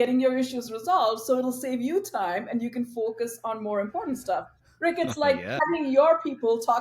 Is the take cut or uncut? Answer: cut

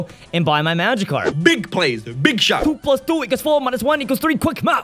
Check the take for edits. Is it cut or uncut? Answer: cut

